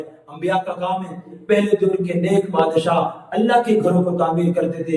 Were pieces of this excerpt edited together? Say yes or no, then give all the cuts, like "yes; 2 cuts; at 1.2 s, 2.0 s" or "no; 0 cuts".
yes; 1 cut; at 1.3 s